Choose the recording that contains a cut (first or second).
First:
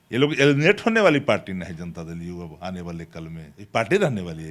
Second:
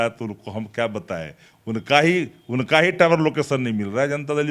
first